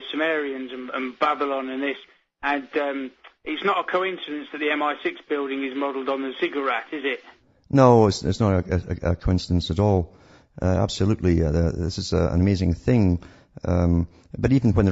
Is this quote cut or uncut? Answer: uncut